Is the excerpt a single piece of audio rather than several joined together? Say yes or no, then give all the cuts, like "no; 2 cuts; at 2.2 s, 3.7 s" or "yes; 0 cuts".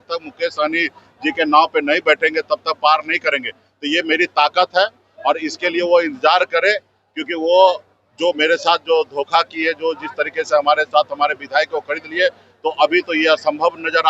yes; 0 cuts